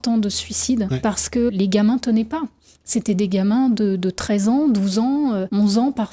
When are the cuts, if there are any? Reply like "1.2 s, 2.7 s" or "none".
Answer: 0.9 s